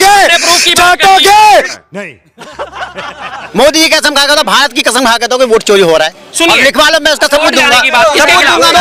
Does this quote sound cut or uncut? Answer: uncut